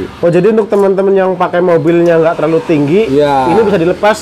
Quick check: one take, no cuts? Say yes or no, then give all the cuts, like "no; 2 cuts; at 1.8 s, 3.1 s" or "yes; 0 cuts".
yes; 0 cuts